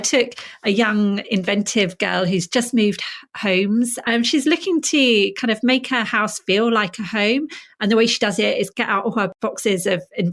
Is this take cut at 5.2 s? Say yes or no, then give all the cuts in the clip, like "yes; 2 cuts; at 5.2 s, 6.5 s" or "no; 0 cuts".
no; 2 cuts; at 4.0 s, 9.3 s